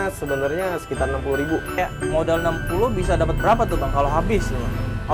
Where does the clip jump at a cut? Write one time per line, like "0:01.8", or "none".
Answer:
0:01.7